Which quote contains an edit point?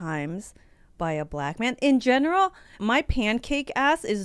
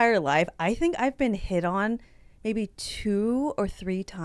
first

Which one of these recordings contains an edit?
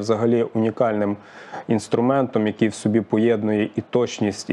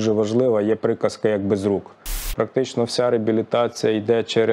second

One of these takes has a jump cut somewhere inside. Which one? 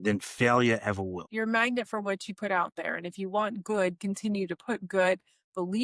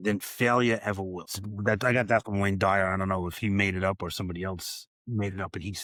first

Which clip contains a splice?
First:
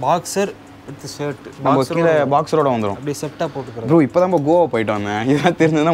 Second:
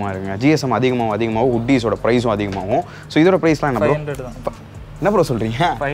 first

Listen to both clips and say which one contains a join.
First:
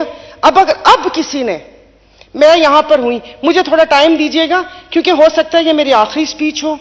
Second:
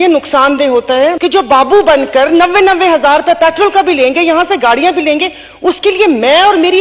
second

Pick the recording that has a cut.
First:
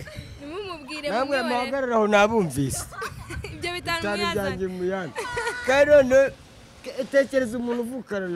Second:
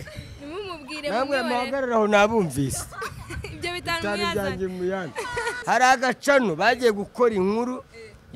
second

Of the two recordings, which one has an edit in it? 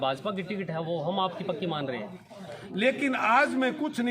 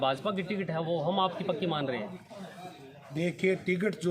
first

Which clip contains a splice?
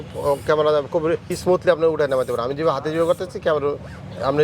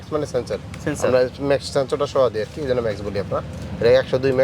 first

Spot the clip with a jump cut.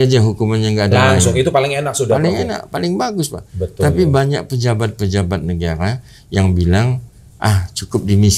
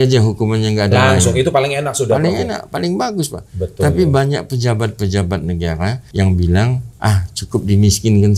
second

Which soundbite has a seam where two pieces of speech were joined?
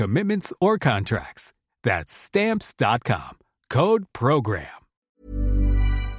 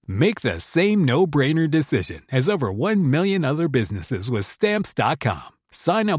first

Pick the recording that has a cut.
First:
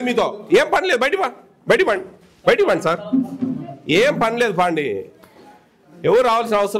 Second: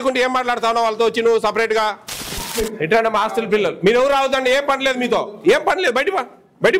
second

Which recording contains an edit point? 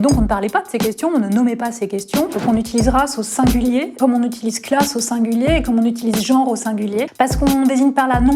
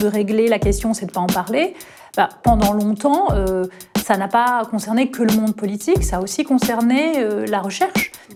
first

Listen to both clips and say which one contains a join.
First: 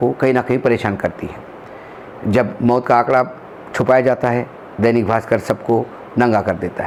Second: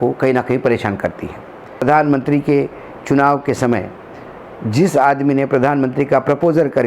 second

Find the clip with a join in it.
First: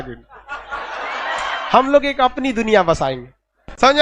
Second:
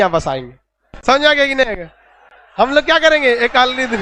first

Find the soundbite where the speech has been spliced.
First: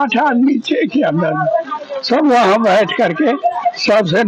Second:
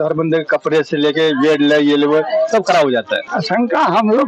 second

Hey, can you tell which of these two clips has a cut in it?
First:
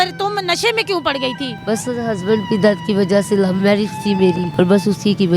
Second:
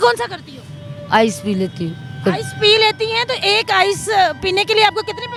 first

